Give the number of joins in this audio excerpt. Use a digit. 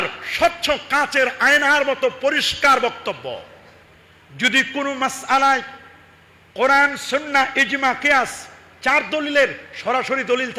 0